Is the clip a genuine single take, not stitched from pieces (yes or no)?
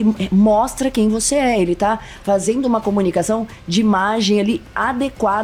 yes